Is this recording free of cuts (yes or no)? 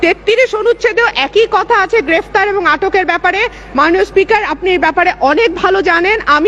yes